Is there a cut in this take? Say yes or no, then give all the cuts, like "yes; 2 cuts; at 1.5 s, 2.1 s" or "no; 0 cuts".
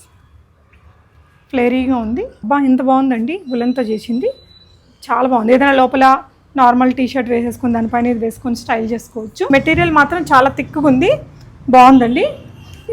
yes; 2 cuts; at 2.4 s, 9.5 s